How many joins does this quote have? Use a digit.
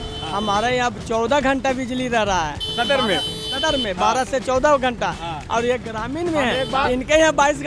0